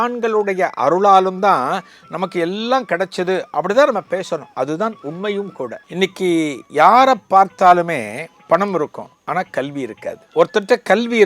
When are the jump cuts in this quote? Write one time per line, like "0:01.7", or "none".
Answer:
0:05.8
0:08.3
0:09.1
0:10.2